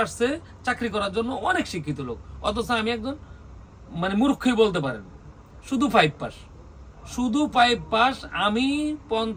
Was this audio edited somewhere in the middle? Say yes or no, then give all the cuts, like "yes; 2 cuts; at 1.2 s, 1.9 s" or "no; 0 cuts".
no; 0 cuts